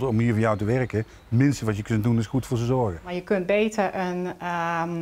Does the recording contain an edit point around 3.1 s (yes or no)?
yes